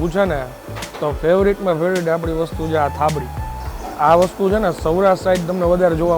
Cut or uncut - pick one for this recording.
uncut